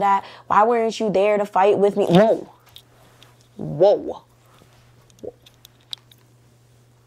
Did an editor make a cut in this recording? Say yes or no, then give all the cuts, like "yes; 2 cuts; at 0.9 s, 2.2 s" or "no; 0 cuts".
no; 0 cuts